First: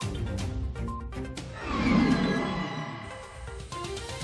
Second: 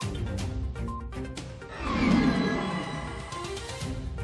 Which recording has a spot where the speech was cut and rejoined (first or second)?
first